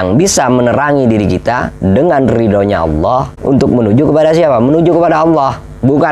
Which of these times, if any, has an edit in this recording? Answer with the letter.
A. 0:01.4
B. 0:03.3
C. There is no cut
B